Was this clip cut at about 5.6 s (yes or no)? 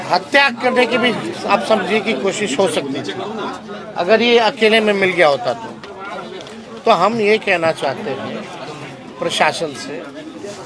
no